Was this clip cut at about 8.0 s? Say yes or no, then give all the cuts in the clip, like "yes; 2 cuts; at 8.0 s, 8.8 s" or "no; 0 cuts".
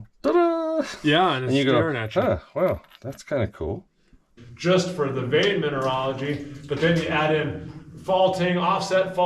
no; 1 cut; at 4.3 s